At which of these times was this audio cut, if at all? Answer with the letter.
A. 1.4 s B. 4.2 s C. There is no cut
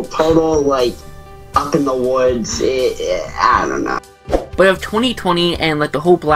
B